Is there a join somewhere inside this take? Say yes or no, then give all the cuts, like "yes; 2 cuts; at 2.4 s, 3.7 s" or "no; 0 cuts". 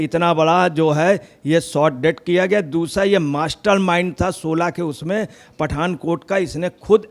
no; 0 cuts